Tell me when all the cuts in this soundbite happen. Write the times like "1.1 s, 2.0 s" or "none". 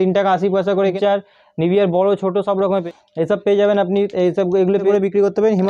0.9 s, 2.8 s, 4.8 s

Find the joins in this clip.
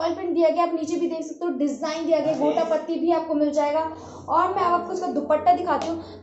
none

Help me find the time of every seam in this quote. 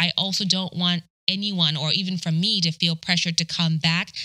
1.1 s

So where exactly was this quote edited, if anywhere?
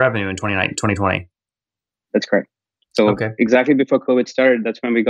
none

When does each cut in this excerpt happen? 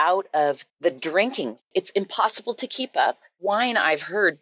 1.7 s, 3.3 s

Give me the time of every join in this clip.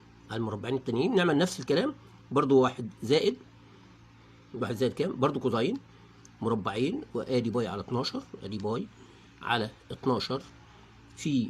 9.8 s

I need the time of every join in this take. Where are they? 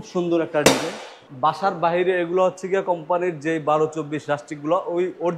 1.2 s

